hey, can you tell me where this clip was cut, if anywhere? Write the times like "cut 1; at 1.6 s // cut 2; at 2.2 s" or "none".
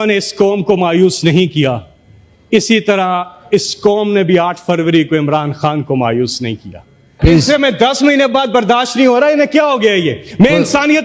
cut 1; at 7.2 s